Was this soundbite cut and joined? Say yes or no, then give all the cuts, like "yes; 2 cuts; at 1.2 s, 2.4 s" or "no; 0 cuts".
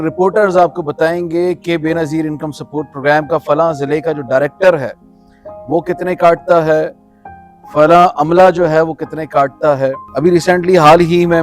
yes; 1 cut; at 10.0 s